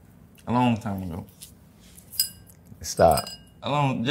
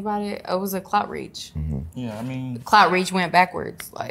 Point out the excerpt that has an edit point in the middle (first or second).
second